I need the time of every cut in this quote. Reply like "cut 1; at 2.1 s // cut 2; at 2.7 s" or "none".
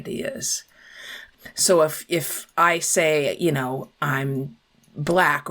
cut 1; at 1.3 s